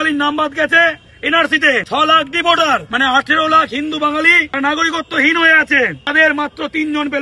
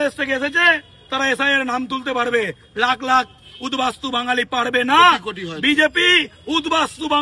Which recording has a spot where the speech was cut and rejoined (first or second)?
first